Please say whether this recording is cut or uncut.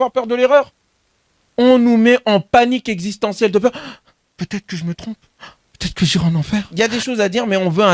cut